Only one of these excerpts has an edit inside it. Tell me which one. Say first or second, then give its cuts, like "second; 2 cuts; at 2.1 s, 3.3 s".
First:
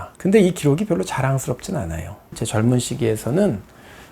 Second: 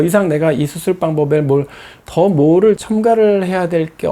first; 1 cut; at 2.4 s